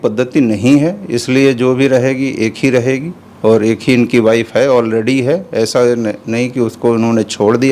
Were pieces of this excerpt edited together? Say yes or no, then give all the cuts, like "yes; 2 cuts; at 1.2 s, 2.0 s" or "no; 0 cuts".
no; 0 cuts